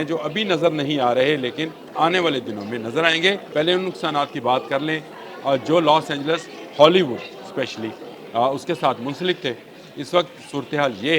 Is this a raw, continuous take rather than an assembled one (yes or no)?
no